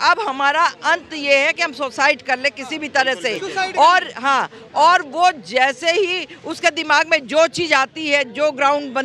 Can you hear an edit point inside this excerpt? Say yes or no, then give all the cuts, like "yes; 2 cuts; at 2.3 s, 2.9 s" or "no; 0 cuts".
no; 0 cuts